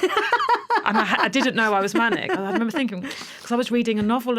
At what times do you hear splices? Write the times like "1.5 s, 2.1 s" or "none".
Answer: none